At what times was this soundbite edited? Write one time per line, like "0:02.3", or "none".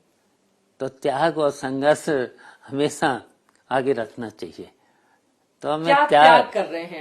none